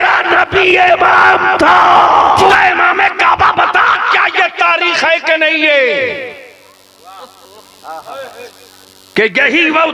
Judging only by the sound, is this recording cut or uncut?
cut